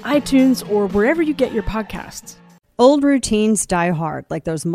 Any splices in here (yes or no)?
yes